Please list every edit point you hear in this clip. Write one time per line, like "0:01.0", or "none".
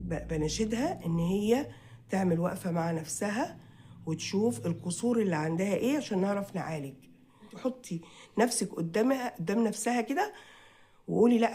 0:07.5